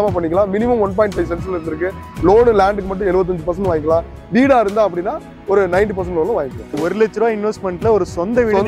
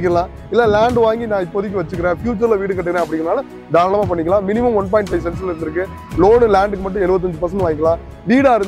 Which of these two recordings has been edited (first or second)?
first